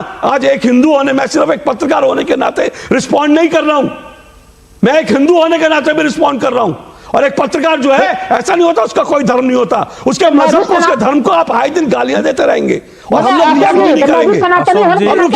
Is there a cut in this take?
no; 0 cuts

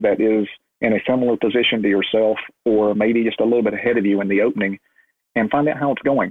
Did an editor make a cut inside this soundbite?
no; 0 cuts

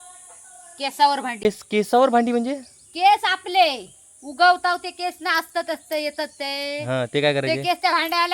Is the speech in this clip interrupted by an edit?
yes; 1 cut; at 1.4 s

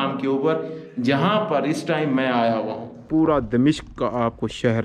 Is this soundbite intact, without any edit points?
no; 1 cut; at 3.0 s

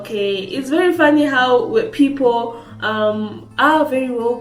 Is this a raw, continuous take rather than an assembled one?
yes; 0 cuts

